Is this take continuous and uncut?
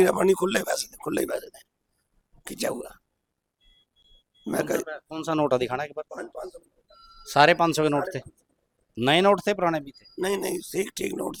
yes; 0 cuts

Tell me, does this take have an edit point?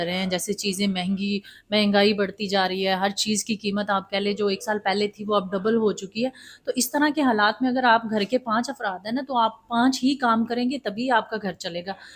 no; 0 cuts

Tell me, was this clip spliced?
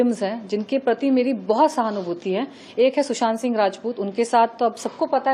no; 0 cuts

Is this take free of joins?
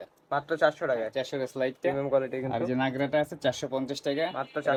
yes; 0 cuts

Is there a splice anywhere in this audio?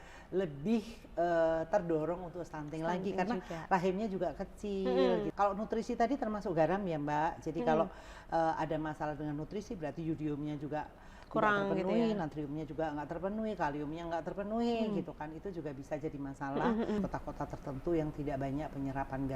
yes; 2 cuts; at 5.3 s, 17.0 s

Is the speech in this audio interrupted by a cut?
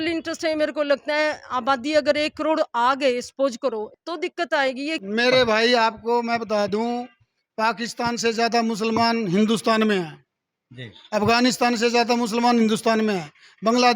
yes; 2 cuts; at 3.9 s, 4.9 s

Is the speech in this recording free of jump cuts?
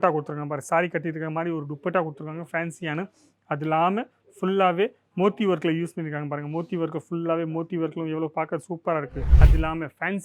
no; 1 cut; at 9.3 s

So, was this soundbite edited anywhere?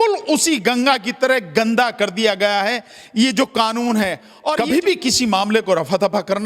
yes; 1 cut; at 4.5 s

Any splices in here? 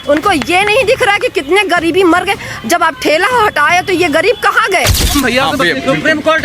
yes; 1 cut; at 5.1 s

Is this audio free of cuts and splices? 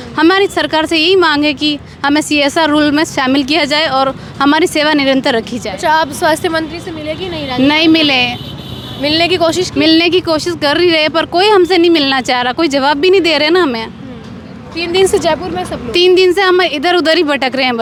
yes; 0 cuts

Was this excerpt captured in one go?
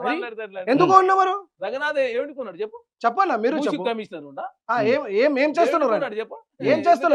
yes; 0 cuts

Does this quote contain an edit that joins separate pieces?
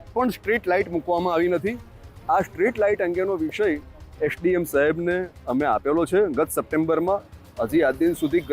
no; 0 cuts

